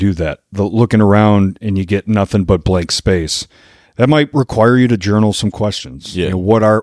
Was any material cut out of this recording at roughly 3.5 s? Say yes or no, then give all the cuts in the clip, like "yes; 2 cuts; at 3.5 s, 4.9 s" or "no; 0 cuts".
no; 0 cuts